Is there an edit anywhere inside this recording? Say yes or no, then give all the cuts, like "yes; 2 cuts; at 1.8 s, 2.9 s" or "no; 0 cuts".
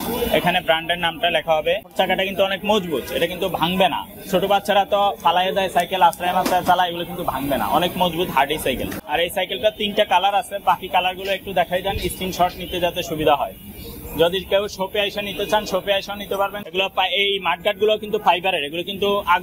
yes; 3 cuts; at 1.9 s, 8.9 s, 16.6 s